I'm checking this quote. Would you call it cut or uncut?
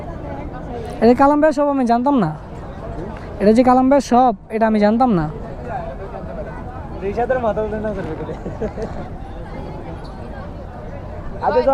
uncut